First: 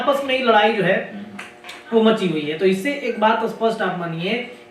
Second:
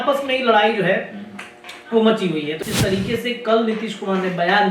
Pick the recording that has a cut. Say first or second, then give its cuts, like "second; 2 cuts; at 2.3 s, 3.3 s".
second; 1 cut; at 2.5 s